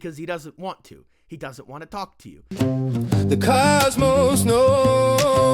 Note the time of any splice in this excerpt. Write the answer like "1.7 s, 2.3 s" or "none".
2.3 s

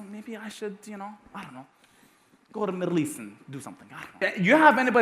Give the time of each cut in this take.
4.1 s

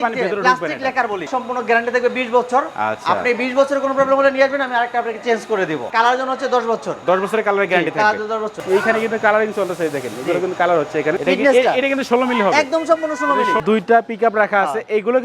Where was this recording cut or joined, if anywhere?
1.3 s, 5.9 s, 8.6 s, 11.2 s, 13.6 s

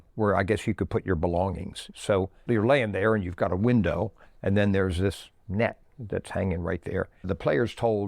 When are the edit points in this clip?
2.4 s, 7.3 s

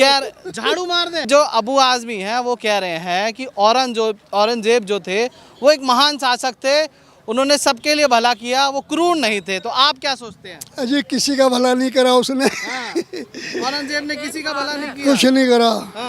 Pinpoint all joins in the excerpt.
1.2 s

